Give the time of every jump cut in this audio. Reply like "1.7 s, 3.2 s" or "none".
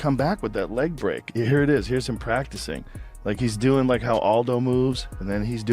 3.9 s